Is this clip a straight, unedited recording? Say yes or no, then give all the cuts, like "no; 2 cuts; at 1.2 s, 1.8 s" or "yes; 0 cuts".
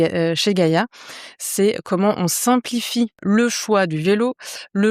no; 1 cut; at 3.2 s